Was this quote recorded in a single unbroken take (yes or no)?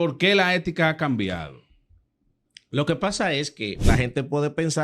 no